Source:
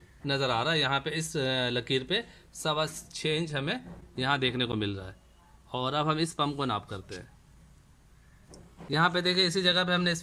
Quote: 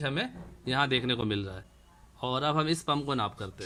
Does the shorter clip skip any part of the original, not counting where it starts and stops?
no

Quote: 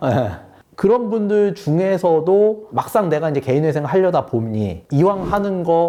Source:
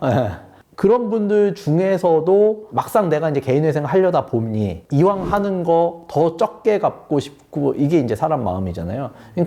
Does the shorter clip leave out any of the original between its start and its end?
no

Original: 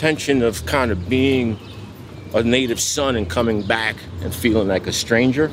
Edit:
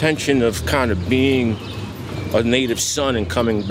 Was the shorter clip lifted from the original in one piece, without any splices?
yes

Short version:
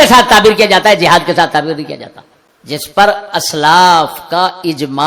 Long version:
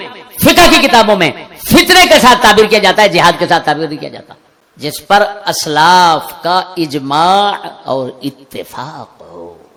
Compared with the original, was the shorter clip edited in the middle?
no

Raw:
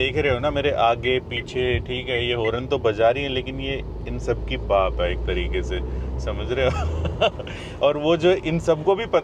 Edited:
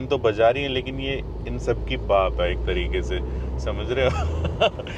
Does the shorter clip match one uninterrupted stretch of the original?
yes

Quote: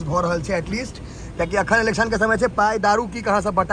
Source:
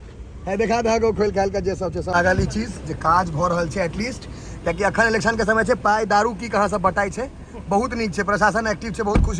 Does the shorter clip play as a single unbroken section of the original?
yes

